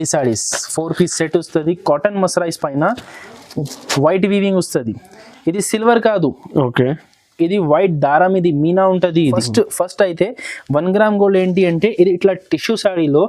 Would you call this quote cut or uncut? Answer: cut